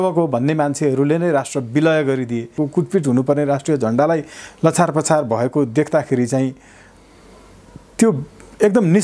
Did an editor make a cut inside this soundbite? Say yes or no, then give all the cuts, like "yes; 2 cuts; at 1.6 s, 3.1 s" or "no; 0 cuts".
yes; 1 cut; at 2.5 s